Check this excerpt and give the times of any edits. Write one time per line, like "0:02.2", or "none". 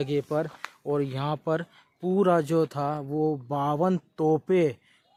none